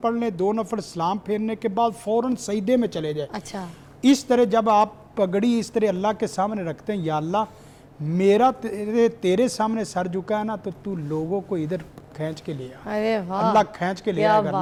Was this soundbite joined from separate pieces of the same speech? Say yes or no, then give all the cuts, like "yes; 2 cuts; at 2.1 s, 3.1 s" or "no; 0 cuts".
no; 0 cuts